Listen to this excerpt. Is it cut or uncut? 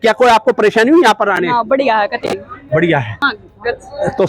cut